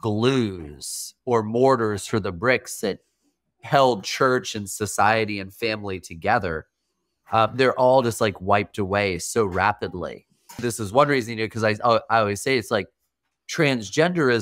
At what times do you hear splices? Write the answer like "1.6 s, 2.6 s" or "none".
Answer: 10.6 s